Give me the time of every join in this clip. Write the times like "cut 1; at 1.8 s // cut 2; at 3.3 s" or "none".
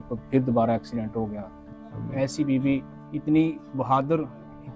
cut 1; at 1.6 s // cut 2; at 3.0 s

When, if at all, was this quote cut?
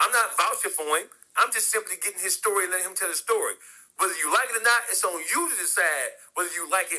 none

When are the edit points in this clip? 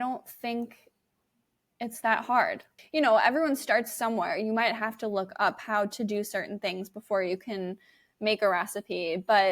cut 1; at 2.7 s

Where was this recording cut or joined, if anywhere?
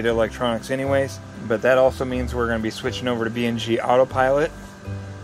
cut 1; at 1.3 s

